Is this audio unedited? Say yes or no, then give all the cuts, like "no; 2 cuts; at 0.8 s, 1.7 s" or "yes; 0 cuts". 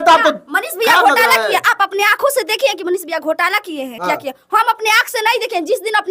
yes; 0 cuts